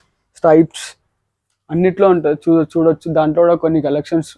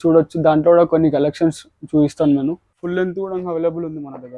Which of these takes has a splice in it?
second; 1 cut; at 2.7 s

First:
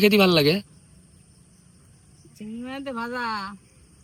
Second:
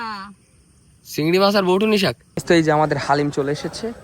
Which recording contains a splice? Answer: second; 1 cut; at 2.3 s

